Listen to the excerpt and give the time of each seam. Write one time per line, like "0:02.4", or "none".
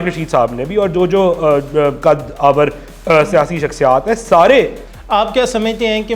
0:04.8